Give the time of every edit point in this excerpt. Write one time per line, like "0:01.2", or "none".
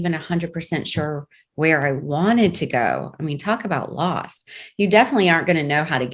none